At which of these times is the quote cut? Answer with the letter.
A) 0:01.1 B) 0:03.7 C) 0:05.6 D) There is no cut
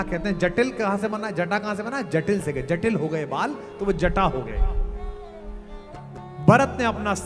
D